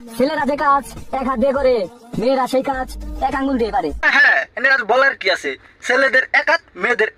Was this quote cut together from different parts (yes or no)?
no